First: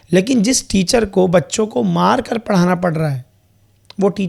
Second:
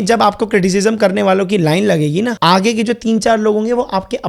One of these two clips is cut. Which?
second; 1 cut; at 2.4 s

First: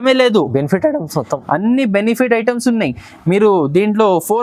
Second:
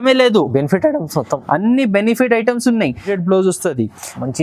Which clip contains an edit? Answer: second; 1 cut; at 3.1 s

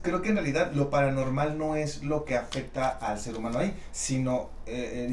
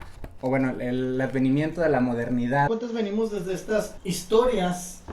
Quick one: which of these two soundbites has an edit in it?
second; 2 cuts; at 2.7 s, 3.9 s

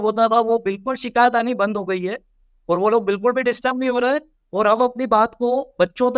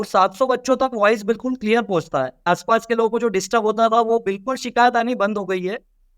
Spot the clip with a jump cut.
second; 1 cut; at 2.5 s

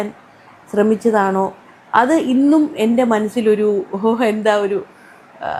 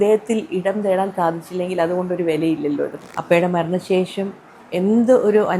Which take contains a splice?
second; 1 cut; at 3.0 s

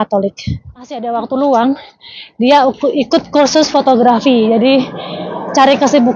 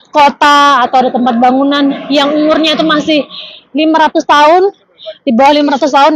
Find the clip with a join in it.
first; 1 cut; at 0.9 s

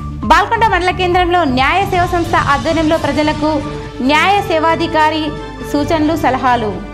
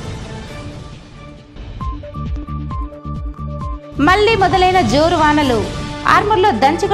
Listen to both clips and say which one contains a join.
second; 2 cuts; at 1.8 s, 2.9 s

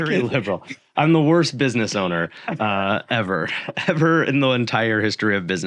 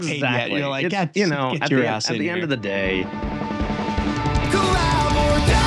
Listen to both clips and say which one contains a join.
second; 1 cut; at 3.2 s

